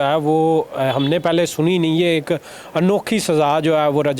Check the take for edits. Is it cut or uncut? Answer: uncut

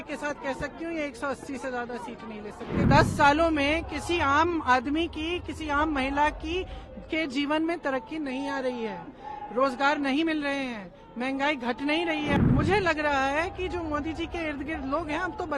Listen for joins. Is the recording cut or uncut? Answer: cut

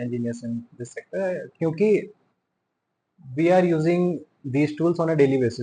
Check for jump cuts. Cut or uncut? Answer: uncut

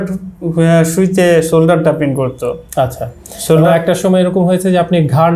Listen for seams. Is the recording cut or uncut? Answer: uncut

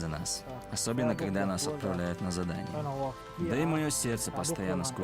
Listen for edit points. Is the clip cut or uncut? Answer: cut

